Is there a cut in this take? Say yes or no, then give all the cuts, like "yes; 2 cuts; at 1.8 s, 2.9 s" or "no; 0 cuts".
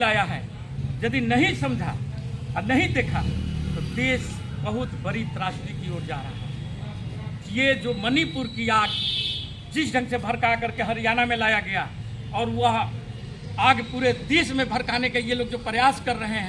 no; 0 cuts